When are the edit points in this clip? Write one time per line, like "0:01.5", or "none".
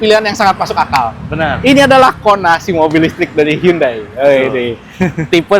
none

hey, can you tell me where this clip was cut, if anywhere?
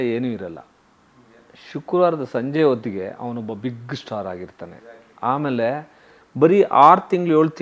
none

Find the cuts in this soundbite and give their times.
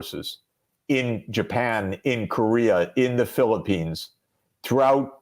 none

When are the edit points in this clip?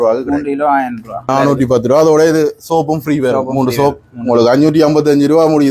0:01.3

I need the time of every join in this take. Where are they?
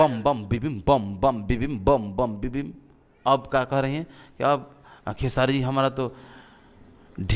none

